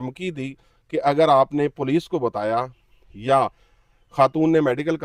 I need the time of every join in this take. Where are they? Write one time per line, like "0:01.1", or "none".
none